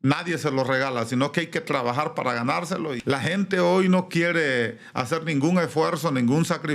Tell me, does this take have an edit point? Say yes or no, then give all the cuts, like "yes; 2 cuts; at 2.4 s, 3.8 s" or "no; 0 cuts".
yes; 1 cut; at 2.9 s